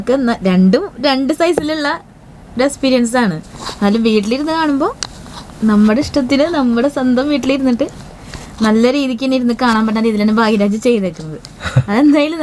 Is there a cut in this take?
no; 0 cuts

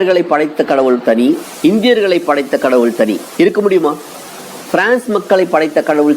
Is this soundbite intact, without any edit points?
no; 2 cuts; at 1.5 s, 3.2 s

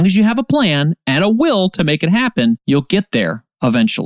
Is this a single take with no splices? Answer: no; 1 cut; at 2.6 s

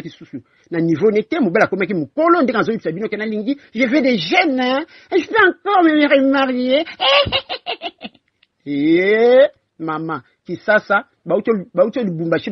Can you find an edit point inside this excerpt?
no; 0 cuts

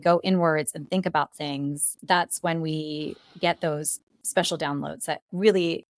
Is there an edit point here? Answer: yes; 1 cut; at 1.9 s

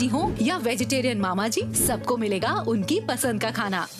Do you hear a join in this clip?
no; 0 cuts

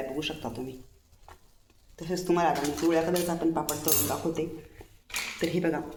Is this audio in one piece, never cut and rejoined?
yes; 0 cuts

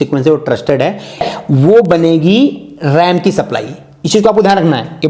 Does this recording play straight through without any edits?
no; 1 cut; at 1.2 s

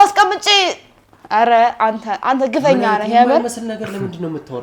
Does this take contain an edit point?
no; 0 cuts

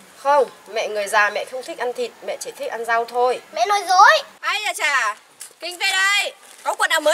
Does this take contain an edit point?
yes; 1 cut; at 4.4 s

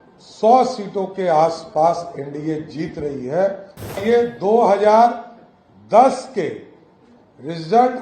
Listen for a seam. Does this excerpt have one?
yes; 1 cut; at 4.0 s

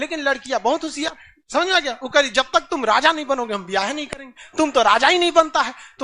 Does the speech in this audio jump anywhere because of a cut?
no; 0 cuts

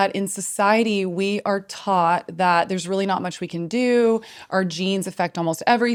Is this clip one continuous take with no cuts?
yes; 0 cuts

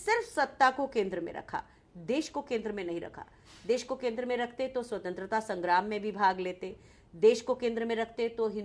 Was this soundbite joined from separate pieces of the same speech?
no; 0 cuts

